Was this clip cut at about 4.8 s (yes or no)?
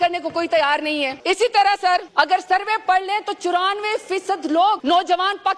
yes